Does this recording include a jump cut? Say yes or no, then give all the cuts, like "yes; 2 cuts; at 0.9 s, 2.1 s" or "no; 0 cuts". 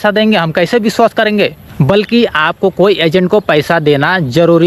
yes; 1 cut; at 1.7 s